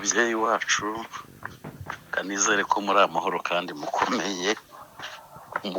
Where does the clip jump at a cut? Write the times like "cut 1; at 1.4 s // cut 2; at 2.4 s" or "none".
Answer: none